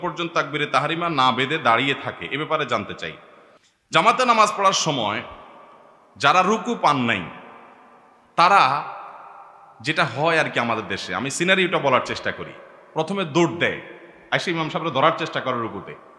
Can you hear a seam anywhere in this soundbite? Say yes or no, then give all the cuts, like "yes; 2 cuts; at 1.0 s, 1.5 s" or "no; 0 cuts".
no; 0 cuts